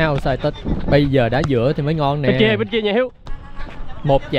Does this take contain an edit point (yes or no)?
yes